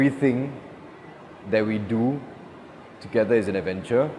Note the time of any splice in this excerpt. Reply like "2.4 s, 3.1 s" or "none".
none

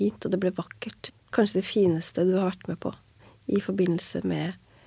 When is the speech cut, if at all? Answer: 1.0 s

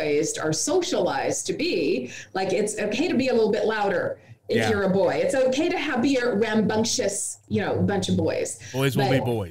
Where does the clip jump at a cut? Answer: none

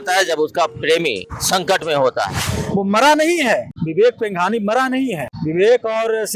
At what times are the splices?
1.3 s, 2.5 s, 3.8 s, 5.3 s

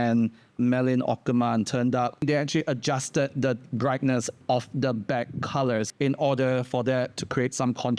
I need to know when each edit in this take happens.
2.2 s, 5.9 s

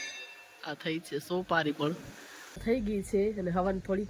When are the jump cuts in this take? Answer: 2.6 s

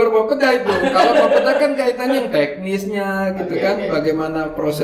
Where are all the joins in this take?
none

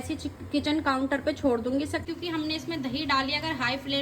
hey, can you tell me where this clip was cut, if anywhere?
2.0 s

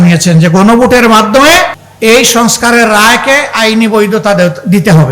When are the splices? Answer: 1.8 s

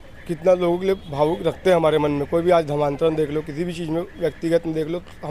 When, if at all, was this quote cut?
none

